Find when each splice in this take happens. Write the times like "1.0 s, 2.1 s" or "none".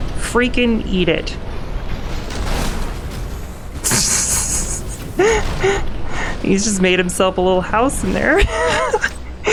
none